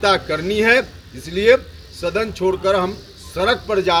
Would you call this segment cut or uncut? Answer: uncut